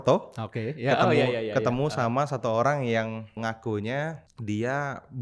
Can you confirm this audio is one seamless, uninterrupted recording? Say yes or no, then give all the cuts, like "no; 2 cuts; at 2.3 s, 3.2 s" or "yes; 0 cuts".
no; 2 cuts; at 3.4 s, 4.3 s